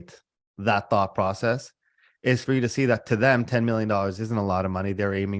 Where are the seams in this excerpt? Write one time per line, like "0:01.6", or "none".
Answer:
0:02.4

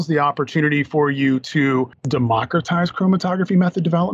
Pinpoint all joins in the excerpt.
0:02.0

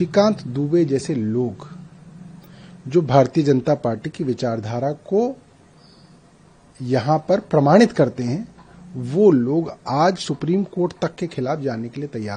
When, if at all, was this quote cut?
none

